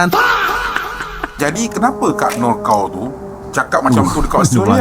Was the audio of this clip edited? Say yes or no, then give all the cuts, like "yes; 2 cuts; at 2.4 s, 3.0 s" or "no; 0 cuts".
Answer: yes; 1 cut; at 1.3 s